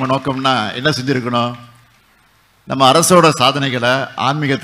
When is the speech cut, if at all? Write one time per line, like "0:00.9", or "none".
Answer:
none